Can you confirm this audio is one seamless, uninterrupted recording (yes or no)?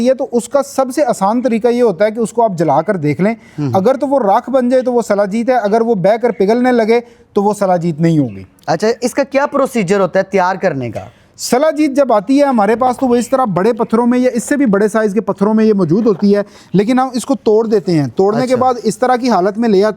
yes